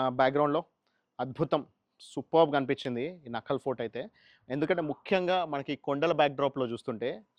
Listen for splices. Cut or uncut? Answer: uncut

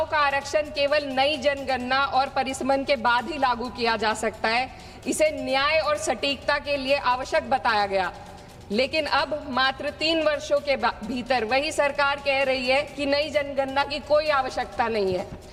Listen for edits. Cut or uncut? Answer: uncut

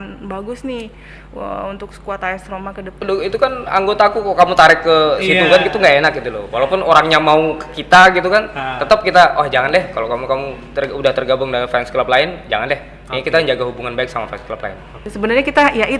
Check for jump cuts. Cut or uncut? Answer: cut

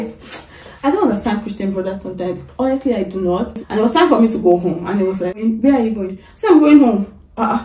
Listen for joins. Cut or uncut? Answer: cut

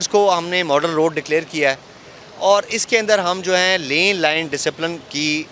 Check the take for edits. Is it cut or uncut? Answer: uncut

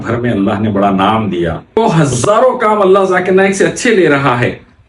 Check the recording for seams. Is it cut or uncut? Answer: cut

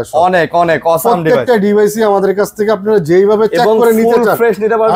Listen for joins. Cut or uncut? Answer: uncut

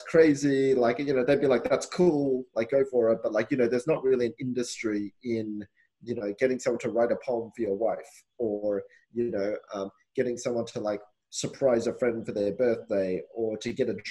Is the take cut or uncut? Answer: uncut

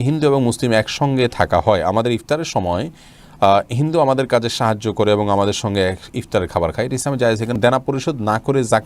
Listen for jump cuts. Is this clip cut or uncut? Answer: cut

